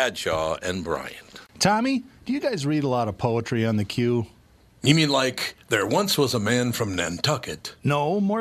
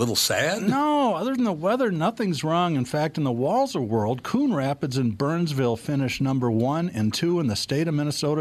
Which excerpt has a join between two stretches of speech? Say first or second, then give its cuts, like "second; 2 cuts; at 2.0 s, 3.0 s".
first; 1 cut; at 1.4 s